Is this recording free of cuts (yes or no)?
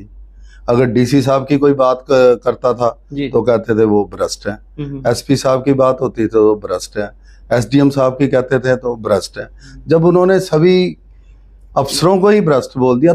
yes